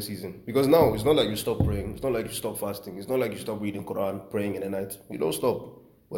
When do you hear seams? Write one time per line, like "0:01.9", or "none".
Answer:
none